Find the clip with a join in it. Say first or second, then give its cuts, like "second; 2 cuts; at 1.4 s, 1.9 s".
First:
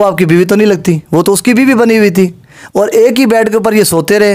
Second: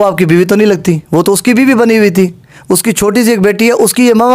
first; 1 cut; at 2.5 s